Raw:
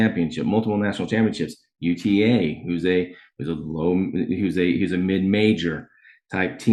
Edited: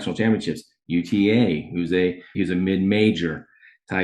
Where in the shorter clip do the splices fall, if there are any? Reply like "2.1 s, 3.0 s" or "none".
2.4 s